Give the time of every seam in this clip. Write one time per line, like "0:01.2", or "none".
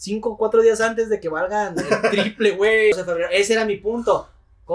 0:02.9